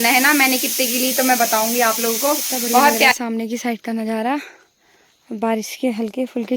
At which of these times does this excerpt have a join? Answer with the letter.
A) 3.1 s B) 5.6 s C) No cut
A